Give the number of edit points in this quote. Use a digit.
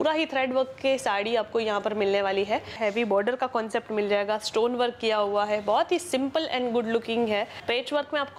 2